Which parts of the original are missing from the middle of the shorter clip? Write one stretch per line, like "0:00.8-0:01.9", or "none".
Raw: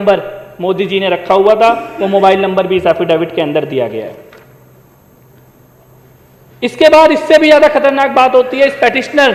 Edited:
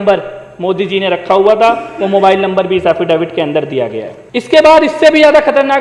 0:04.1-0:06.4